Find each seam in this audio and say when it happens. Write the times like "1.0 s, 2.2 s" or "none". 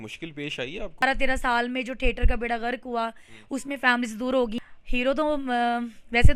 1.0 s, 4.6 s